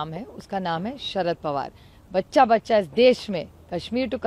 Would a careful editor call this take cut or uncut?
uncut